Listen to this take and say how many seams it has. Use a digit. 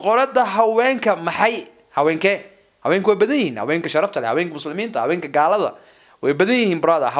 0